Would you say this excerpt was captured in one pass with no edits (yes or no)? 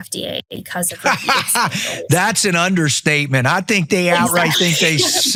yes